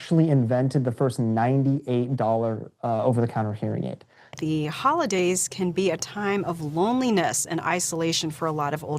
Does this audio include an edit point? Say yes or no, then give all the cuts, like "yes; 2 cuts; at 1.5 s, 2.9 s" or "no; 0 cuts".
yes; 1 cut; at 4.3 s